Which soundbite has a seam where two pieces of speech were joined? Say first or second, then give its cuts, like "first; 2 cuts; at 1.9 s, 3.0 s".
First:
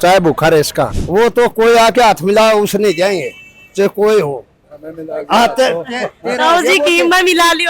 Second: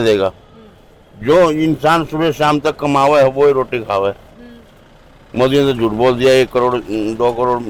first; 1 cut; at 1.0 s